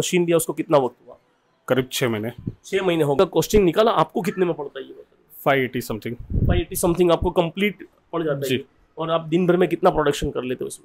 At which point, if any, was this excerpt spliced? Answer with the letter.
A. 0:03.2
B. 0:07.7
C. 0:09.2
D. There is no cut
A